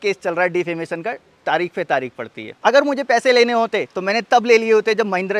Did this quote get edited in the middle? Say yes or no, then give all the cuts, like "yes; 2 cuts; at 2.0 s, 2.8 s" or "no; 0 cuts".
no; 0 cuts